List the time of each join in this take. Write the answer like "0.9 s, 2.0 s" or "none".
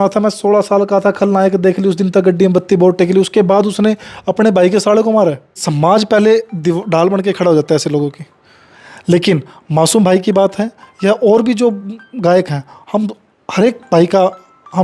5.6 s

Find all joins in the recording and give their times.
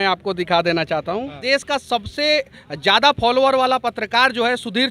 1.4 s

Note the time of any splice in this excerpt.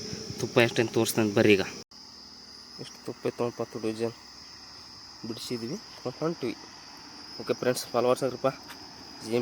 1.9 s

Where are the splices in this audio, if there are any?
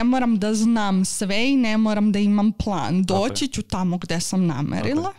none

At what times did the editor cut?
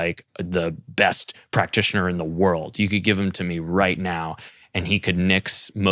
none

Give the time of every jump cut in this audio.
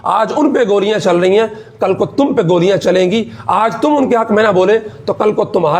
none

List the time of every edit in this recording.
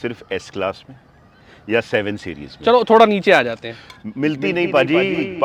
none

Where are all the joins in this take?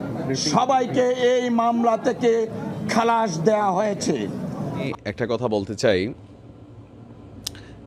4.9 s

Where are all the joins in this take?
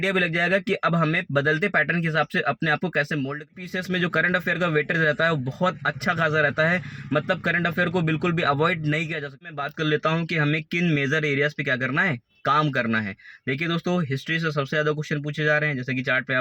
3.4 s, 9.5 s

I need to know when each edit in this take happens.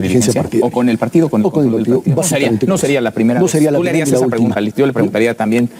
none

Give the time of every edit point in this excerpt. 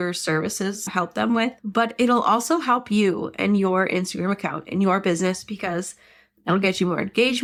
none

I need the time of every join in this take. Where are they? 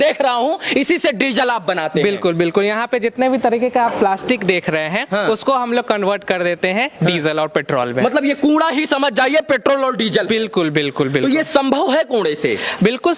none

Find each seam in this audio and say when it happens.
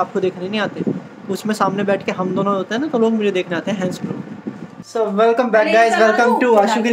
4.7 s

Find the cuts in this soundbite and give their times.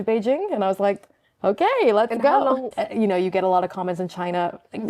2.7 s

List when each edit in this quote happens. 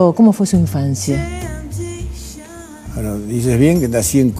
1.2 s

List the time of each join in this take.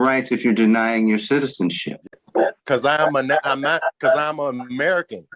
none

